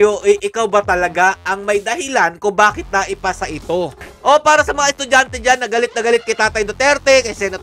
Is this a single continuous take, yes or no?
no